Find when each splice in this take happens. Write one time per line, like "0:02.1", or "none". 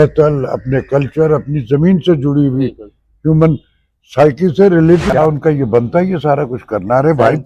0:05.2